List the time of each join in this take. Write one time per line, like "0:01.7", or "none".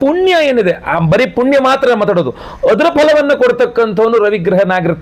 none